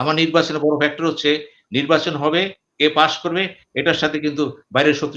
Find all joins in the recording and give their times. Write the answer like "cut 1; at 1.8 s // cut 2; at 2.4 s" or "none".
none